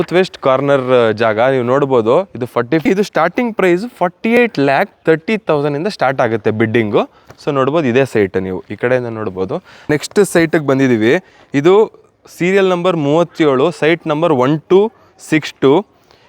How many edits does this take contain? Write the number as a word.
three